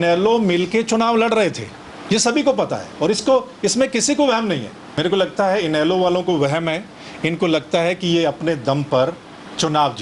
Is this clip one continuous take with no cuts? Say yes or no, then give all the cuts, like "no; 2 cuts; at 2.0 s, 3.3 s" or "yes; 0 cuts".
no; 1 cut; at 4.8 s